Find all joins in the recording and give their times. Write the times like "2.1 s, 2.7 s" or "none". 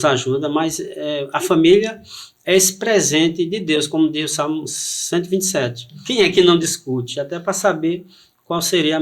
6.0 s